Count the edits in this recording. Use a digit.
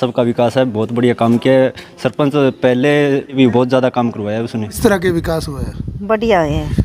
2